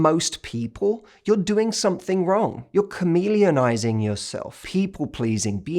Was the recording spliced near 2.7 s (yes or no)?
no